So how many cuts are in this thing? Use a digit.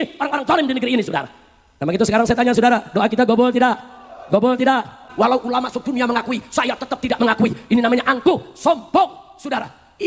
1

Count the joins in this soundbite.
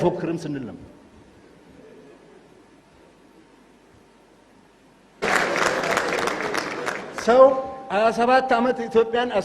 1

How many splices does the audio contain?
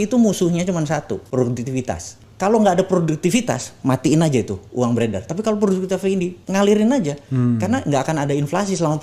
0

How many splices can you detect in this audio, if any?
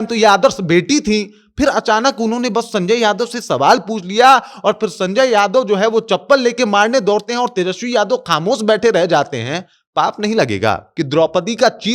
1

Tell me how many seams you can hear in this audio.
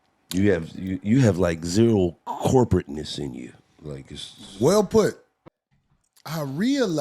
1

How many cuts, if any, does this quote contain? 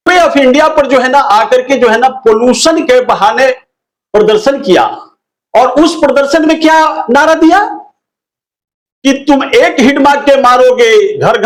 0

